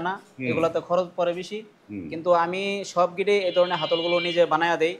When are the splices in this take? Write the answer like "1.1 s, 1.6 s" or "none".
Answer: none